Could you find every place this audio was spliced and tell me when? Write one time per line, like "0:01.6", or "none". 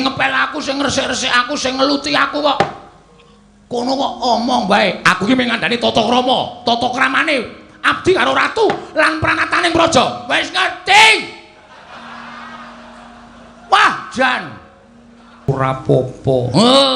0:15.5